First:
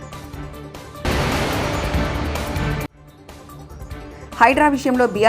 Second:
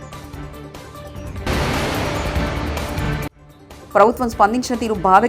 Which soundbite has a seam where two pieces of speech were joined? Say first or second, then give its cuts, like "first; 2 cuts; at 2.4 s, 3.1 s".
first; 2 cuts; at 1.0 s, 3.0 s